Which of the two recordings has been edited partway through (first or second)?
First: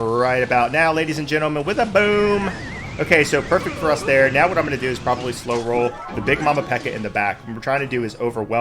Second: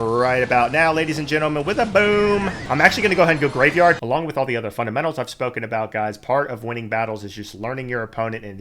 second